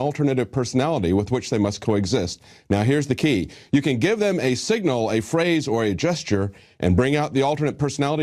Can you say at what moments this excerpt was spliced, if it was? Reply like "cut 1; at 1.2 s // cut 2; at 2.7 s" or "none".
cut 1; at 6.5 s